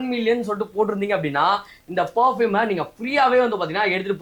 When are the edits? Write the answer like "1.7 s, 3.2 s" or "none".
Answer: none